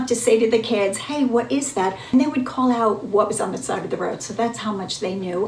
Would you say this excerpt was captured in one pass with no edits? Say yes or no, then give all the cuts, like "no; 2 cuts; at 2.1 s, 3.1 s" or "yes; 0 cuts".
no; 1 cut; at 2.1 s